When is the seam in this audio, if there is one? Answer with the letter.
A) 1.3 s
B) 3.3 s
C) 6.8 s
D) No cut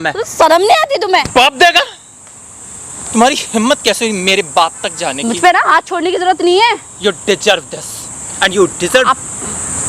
A